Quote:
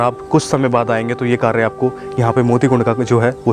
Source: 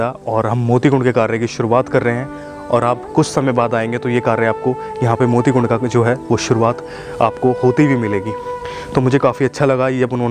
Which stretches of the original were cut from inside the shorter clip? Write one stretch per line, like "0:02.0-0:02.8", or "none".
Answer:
none